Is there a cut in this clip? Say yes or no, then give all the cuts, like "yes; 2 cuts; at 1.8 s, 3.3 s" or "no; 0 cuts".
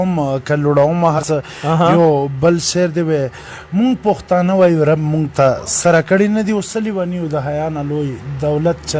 yes; 1 cut; at 1.2 s